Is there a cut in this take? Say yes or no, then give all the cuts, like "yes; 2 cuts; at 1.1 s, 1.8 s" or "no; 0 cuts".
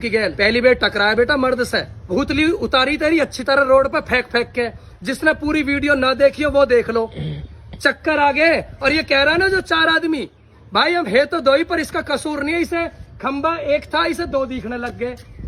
yes; 1 cut; at 2.1 s